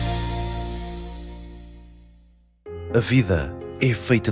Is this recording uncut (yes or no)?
no